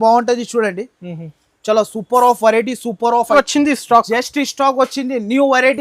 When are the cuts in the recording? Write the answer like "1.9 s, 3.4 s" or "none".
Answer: 3.3 s